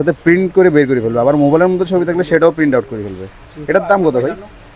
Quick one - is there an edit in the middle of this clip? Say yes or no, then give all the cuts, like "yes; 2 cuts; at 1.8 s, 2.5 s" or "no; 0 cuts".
no; 0 cuts